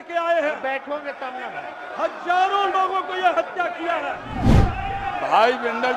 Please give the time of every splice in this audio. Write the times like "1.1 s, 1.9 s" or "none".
4.4 s